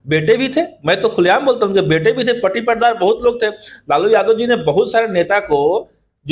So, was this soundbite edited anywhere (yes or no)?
no